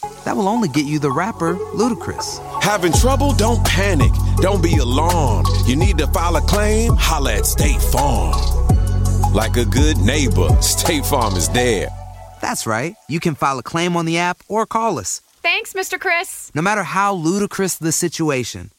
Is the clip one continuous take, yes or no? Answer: yes